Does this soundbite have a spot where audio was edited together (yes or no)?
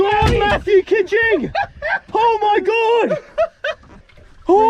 yes